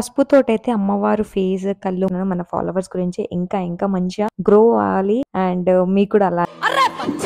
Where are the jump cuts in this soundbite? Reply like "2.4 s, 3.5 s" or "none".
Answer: 2.1 s, 6.5 s